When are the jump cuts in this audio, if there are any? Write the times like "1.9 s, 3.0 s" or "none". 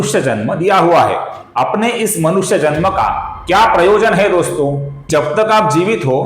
4.9 s